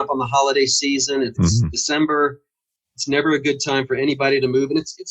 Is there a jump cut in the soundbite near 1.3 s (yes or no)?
yes